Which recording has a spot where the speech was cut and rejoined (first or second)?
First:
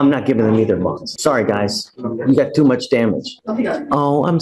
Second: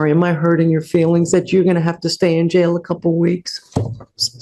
first